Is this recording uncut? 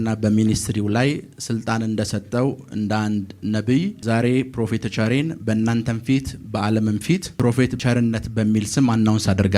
no; 2 cuts; at 4.0 s, 7.7 s

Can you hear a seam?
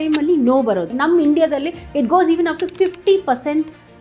yes; 1 cut; at 0.9 s

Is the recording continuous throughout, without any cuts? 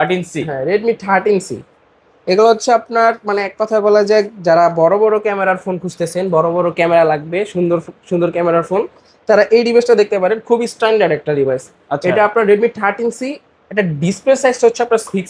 yes; 0 cuts

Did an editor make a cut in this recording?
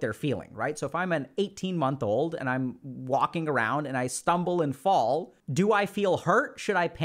no; 0 cuts

